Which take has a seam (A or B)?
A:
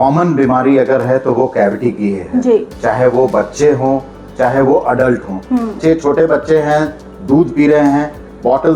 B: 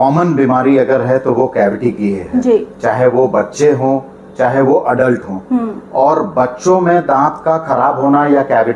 A